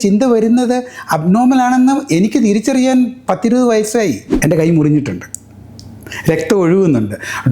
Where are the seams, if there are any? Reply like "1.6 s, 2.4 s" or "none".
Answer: 4.3 s